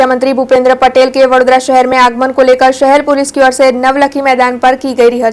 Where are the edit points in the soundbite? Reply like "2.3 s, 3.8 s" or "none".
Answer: none